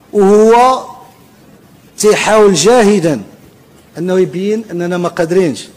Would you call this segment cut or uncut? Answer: uncut